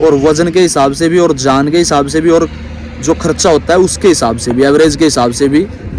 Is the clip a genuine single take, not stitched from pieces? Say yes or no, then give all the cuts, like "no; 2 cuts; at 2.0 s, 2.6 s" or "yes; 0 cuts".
yes; 0 cuts